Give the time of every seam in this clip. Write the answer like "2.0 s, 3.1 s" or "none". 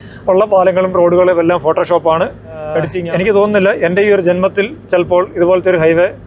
3.0 s